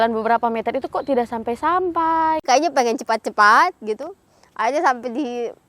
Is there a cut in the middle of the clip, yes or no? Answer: yes